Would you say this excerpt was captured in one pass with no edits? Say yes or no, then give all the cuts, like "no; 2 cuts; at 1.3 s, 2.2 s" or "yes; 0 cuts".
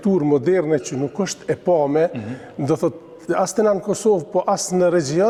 yes; 0 cuts